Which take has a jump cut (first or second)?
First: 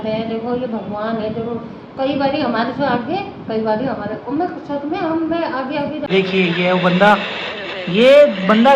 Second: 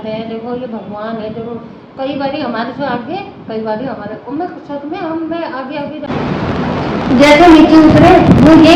first